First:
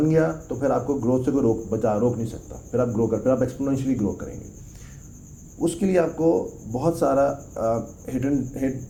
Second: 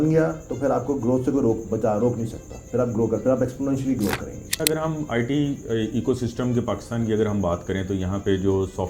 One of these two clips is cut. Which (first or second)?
second